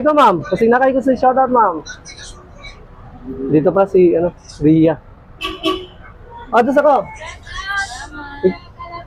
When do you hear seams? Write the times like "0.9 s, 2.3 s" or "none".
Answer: none